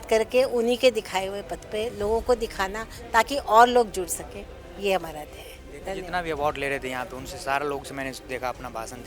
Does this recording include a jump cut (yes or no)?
no